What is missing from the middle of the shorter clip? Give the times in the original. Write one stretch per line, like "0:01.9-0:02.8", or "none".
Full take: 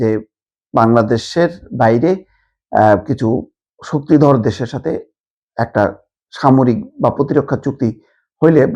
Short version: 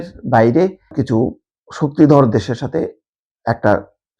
0:02.4-0:03.1